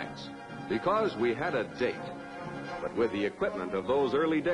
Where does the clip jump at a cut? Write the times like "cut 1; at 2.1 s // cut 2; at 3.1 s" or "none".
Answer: none